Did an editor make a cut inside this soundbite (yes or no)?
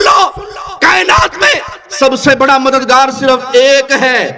no